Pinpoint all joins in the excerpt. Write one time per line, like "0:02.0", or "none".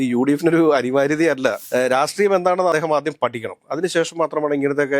0:01.6